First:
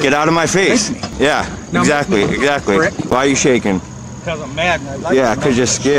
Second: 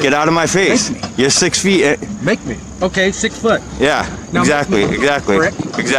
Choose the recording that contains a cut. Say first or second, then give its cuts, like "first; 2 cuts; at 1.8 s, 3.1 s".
first; 2 cuts; at 1.1 s, 3.1 s